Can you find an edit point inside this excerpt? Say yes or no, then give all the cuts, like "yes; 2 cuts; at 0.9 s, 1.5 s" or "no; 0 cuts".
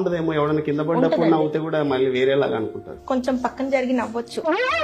yes; 1 cut; at 2.9 s